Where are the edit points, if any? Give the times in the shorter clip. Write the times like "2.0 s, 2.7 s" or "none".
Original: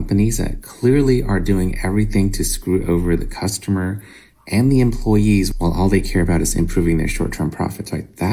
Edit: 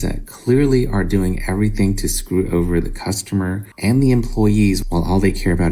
3.7 s